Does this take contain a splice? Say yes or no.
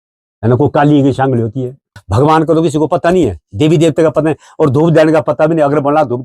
yes